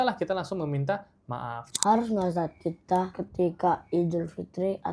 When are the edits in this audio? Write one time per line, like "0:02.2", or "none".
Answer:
0:01.7

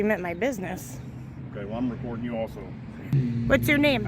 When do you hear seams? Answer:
0:03.1

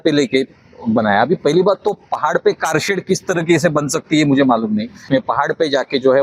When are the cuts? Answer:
0:05.0

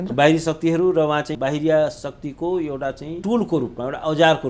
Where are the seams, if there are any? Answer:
0:01.3
0:03.1

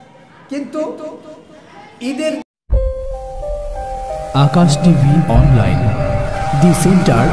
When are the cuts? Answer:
0:02.4

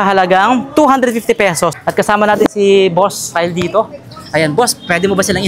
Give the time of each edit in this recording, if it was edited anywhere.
0:01.7

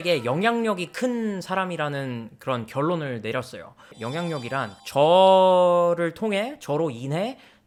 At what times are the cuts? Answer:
none

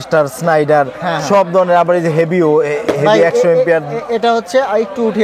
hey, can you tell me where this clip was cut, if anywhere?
none

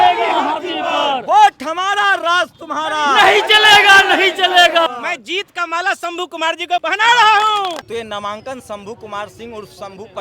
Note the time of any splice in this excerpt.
0:04.9
0:06.8
0:07.9

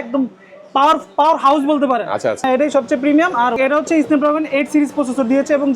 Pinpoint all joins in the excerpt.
0:02.5
0:03.6

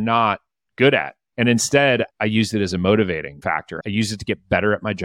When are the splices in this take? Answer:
0:01.2
0:03.3

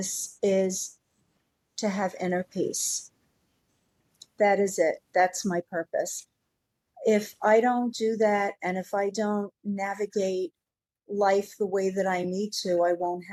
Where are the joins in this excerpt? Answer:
none

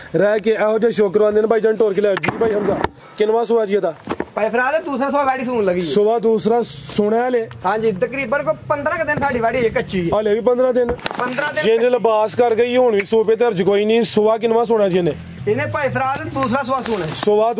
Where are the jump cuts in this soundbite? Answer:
none

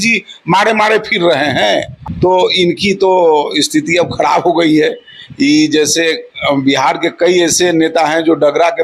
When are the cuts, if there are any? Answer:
0:01.9

